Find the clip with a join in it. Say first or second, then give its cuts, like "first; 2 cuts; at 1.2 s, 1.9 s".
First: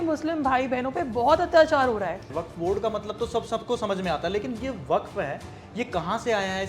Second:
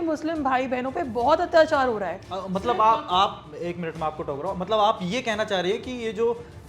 first; 1 cut; at 2.3 s